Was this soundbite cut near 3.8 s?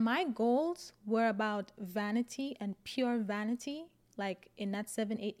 no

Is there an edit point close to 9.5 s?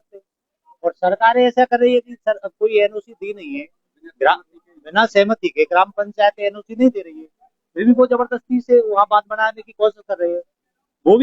no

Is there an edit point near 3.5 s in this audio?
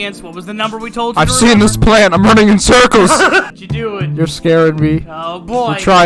yes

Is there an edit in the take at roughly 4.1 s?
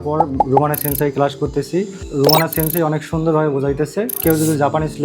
yes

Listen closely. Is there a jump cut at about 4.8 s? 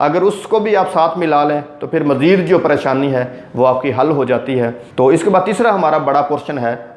yes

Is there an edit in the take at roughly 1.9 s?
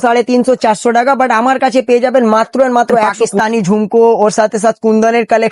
no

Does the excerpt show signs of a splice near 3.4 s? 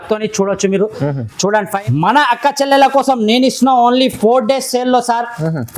no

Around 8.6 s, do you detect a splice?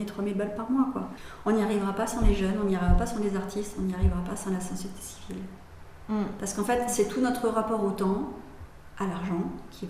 no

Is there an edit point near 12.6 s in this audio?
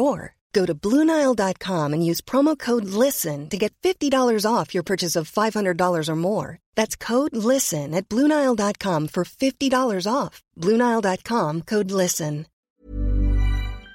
yes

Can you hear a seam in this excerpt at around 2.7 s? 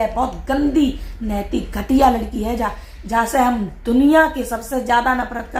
no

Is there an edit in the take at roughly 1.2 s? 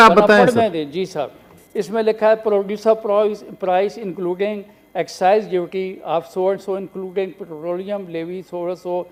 no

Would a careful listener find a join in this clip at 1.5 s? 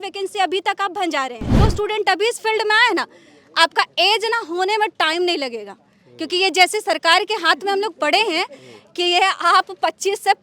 yes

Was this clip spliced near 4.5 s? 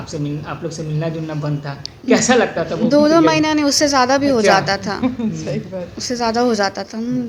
no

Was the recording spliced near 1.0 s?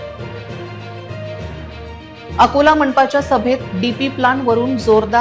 no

